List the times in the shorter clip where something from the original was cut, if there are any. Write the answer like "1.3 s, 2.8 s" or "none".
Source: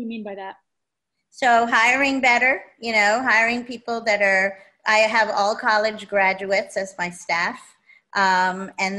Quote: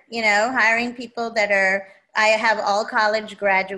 none